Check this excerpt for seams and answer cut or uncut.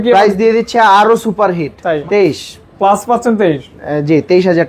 cut